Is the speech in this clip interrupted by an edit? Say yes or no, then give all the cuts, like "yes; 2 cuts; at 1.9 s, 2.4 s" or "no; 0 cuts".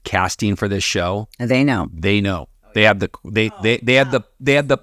no; 0 cuts